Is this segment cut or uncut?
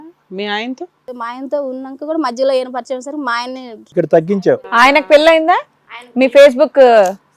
cut